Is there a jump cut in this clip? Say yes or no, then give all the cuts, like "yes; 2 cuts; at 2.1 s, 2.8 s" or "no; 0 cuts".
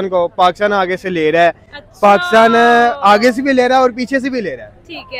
no; 0 cuts